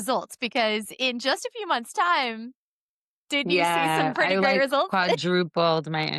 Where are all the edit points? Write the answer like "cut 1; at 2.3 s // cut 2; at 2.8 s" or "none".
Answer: none